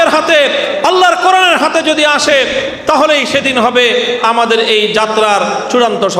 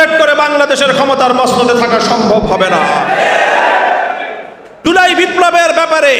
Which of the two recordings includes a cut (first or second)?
second